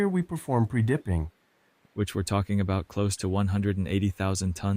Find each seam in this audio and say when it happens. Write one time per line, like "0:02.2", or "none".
0:01.4